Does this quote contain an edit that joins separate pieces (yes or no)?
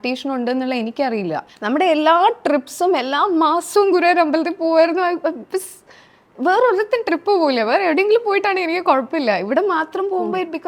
yes